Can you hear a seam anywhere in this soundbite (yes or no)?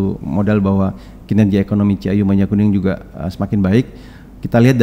no